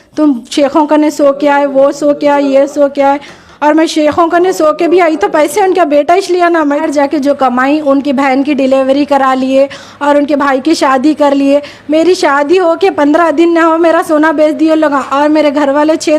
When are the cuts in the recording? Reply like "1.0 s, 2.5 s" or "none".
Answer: 6.8 s